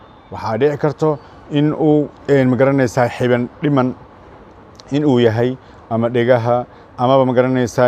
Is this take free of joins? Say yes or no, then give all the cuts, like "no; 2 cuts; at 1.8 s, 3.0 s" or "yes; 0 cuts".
no; 1 cut; at 2.2 s